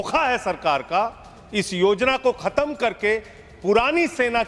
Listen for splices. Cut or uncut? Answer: uncut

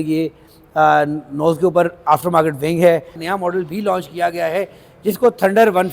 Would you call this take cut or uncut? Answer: cut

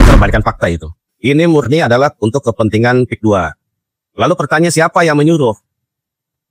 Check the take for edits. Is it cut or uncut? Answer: uncut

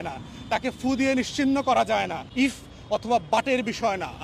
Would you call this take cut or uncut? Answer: cut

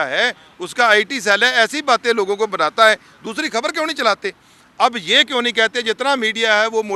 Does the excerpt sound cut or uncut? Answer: uncut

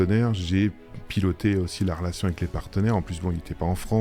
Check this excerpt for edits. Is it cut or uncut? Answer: uncut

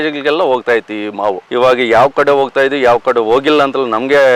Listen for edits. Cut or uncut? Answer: uncut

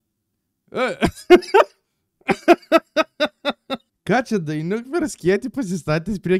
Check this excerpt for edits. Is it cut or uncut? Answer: cut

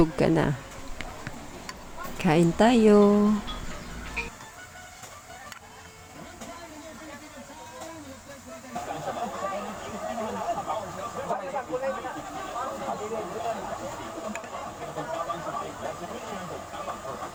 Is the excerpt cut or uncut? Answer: uncut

